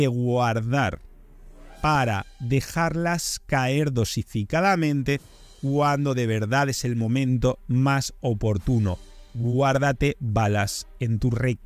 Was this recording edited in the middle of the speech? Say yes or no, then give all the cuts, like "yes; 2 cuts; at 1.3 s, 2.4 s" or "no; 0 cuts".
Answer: no; 0 cuts